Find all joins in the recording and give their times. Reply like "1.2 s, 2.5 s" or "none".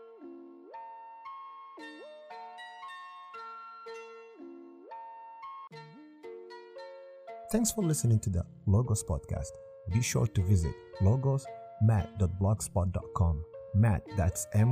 3.9 s, 5.7 s, 7.5 s

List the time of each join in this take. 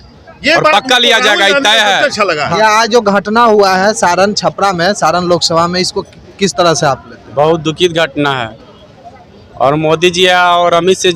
2.5 s

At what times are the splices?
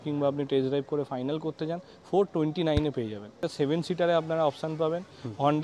3.4 s

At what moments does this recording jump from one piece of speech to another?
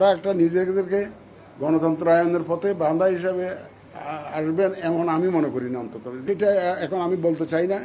6.2 s

